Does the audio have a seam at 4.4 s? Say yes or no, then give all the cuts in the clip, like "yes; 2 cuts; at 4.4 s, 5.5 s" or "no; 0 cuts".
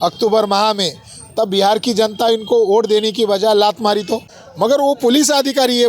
yes; 1 cut; at 4.4 s